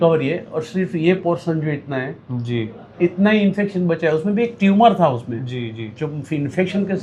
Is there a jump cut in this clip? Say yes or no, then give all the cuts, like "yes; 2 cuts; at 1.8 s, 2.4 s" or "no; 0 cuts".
no; 0 cuts